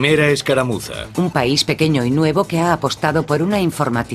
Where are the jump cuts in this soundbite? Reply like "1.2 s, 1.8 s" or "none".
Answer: 2.0 s